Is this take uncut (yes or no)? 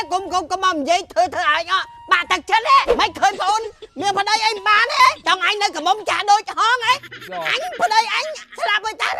no